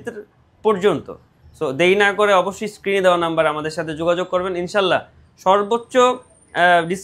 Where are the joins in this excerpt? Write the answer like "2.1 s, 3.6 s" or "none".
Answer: none